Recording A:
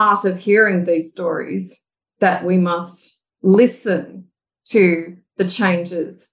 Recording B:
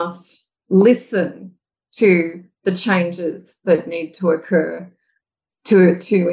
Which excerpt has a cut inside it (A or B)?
B